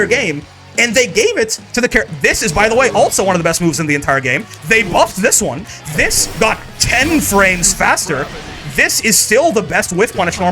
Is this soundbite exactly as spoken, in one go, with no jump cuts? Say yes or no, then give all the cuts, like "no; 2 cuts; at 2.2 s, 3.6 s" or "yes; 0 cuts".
no; 1 cut; at 5.6 s